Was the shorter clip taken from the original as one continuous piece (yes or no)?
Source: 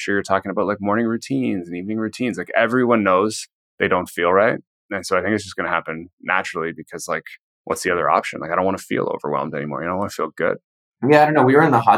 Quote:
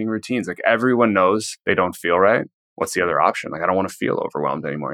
no